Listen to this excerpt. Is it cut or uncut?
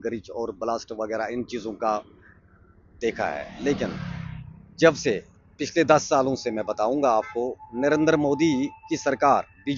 uncut